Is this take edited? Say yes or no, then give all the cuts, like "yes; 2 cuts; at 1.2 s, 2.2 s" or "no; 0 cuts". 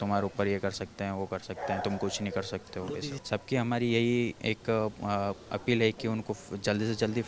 yes; 1 cut; at 3.2 s